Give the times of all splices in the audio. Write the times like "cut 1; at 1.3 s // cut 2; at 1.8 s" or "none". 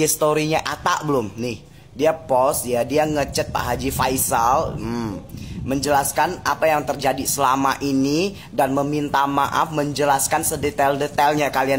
none